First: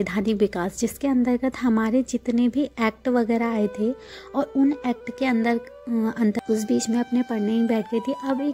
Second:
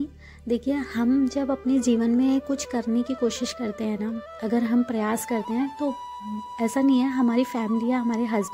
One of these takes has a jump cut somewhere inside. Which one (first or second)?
first